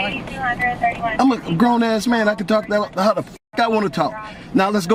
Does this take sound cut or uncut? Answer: uncut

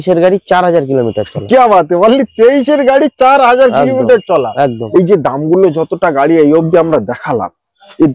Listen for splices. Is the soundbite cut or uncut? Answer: cut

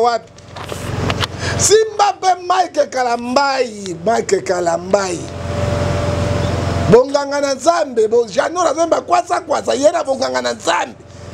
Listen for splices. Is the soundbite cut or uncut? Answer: uncut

